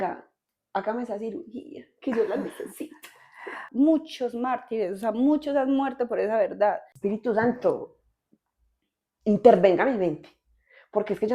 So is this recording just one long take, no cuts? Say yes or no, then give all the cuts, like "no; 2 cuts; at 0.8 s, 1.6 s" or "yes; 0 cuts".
no; 2 cuts; at 3.6 s, 6.9 s